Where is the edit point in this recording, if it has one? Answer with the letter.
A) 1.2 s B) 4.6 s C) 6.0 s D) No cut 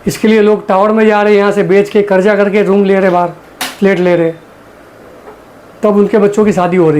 D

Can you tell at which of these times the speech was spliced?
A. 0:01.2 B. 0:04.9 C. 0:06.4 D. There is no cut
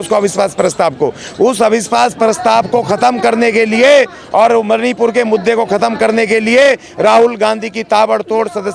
D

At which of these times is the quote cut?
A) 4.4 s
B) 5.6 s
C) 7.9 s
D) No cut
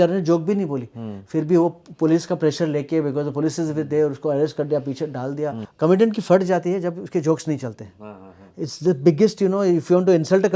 B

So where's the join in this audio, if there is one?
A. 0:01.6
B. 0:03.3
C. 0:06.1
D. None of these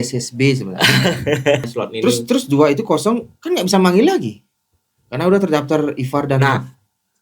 A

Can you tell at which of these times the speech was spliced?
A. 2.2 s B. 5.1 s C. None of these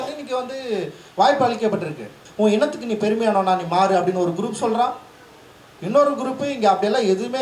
A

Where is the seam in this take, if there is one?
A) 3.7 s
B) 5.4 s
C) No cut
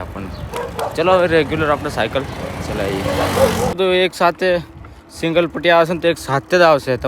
A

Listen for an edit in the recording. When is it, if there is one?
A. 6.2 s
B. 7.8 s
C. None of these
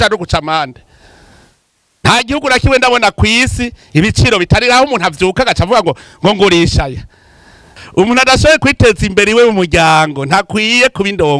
B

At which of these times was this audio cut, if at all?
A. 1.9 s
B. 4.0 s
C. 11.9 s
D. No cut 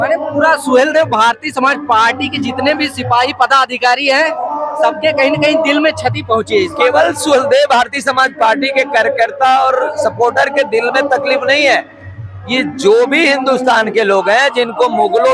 D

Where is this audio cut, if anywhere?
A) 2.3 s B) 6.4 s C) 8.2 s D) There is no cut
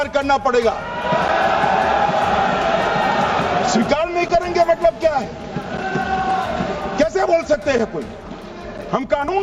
D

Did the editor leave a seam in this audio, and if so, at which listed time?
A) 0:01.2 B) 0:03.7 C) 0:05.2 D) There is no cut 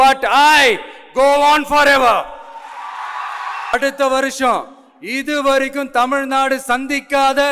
B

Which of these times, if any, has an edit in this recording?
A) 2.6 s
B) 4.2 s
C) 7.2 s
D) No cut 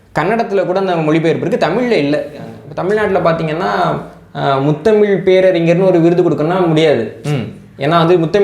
A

